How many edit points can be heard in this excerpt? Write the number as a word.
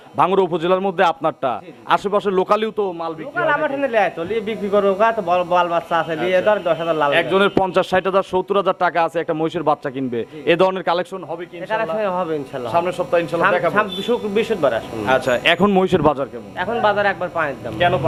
zero